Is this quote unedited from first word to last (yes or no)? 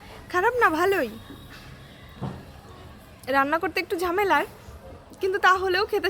yes